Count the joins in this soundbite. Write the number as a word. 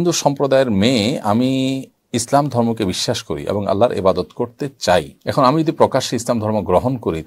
two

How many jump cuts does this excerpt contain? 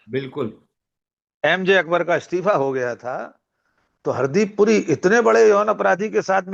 zero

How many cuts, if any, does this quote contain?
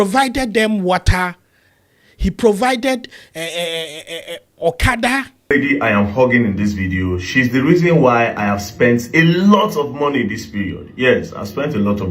one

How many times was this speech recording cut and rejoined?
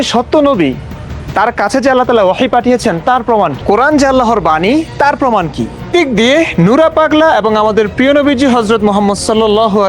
two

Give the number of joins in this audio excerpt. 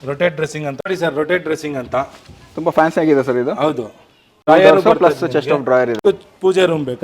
three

